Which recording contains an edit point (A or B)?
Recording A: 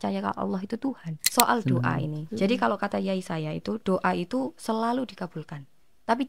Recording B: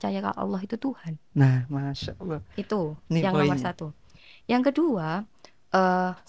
A